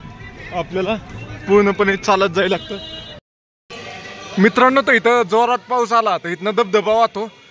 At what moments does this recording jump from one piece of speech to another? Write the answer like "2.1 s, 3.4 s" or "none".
3.2 s